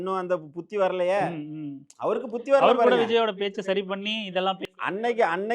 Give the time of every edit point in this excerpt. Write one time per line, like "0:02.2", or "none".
none